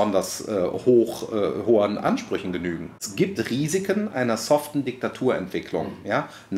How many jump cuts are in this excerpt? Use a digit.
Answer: 1